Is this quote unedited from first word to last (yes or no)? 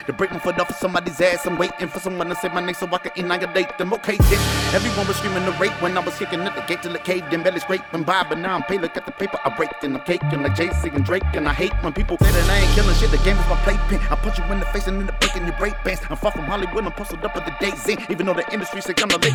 yes